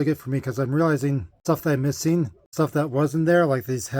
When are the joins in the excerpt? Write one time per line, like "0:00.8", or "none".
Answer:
0:01.3
0:02.4